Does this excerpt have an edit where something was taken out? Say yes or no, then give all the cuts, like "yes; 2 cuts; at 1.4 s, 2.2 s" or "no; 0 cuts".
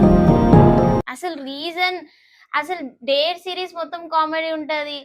no; 0 cuts